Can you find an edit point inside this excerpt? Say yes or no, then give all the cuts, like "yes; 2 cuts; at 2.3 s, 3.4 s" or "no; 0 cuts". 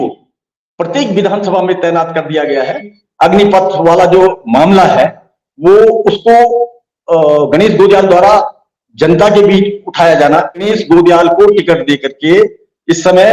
yes; 2 cuts; at 3.0 s, 10.7 s